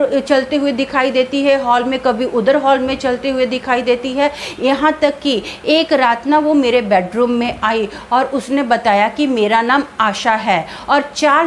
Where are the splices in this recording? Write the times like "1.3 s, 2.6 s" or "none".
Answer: none